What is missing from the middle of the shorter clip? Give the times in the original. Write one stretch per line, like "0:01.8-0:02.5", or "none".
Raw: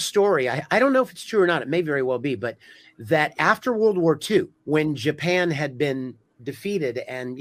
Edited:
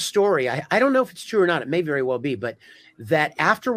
none